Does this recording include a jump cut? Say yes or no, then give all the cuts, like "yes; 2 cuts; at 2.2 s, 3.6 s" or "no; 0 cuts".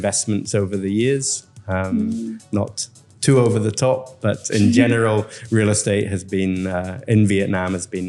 no; 0 cuts